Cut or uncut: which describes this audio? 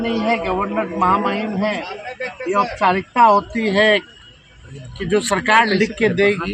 uncut